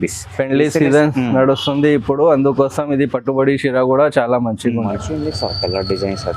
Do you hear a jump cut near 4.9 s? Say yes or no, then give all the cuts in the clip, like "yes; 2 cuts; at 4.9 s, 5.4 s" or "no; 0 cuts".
yes; 1 cut; at 4.9 s